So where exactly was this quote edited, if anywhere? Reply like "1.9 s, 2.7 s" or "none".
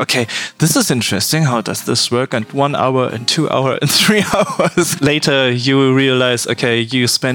2.5 s